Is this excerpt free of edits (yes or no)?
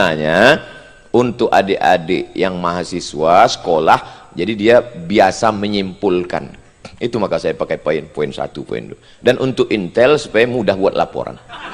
yes